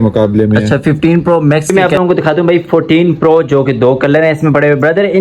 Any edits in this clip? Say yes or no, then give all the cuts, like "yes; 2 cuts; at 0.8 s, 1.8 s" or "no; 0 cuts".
yes; 1 cut; at 1.7 s